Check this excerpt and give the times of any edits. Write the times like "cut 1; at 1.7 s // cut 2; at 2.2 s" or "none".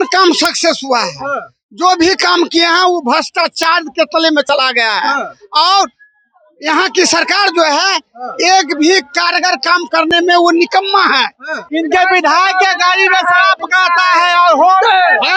cut 1; at 11.6 s